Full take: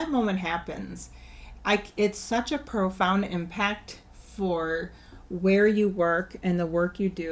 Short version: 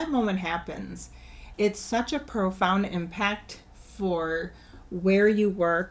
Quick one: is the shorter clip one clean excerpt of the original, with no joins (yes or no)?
no